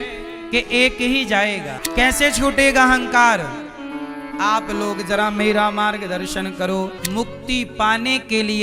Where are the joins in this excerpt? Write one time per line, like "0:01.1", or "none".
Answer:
0:01.7
0:07.0